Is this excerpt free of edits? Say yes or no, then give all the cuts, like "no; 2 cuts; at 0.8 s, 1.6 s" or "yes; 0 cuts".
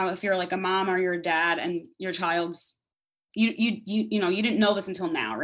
yes; 0 cuts